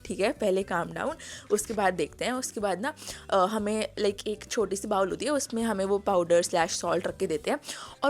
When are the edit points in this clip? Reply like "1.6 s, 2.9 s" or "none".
none